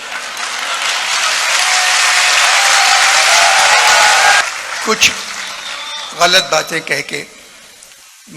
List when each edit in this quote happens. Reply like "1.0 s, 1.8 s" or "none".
4.4 s